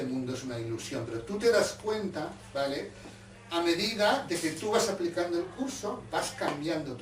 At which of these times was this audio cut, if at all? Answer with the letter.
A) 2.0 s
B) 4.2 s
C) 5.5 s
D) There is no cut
C